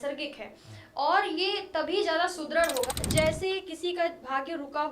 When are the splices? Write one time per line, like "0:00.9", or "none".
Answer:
0:02.9